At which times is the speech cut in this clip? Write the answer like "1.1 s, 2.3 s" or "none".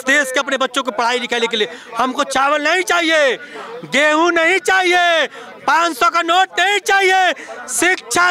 none